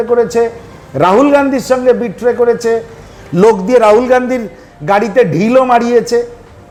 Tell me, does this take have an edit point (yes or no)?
no